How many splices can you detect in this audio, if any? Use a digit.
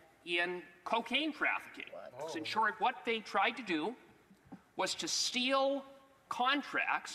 1